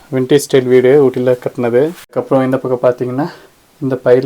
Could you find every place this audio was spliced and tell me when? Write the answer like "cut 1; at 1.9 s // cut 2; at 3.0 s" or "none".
cut 1; at 2.0 s